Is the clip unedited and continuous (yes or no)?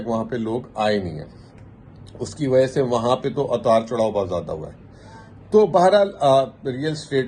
yes